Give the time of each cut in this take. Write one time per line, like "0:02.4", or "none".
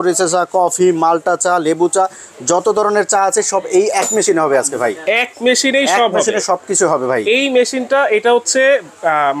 none